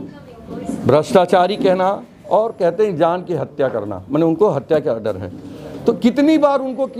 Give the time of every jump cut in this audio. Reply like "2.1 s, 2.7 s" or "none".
none